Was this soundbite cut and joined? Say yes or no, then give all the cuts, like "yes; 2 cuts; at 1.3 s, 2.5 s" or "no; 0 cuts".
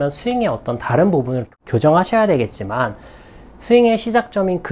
yes; 1 cut; at 1.5 s